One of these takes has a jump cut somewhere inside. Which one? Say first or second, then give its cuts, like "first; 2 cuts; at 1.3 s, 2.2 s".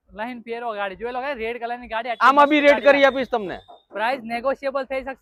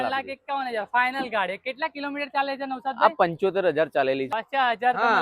second; 1 cut; at 4.3 s